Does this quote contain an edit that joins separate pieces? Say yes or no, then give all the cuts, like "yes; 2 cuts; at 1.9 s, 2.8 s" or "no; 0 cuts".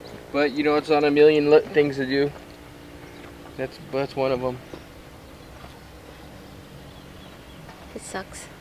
no; 0 cuts